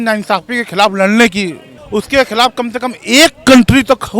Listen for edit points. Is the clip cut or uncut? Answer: cut